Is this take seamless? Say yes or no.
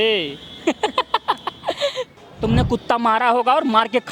no